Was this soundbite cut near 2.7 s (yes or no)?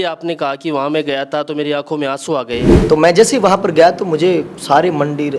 yes